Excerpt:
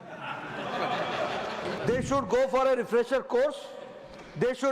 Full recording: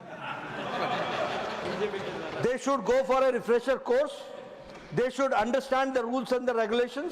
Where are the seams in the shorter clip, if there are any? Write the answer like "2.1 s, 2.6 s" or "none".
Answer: 1.8 s